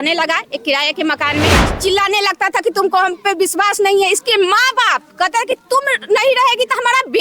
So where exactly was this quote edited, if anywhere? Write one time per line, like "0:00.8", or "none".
0:01.6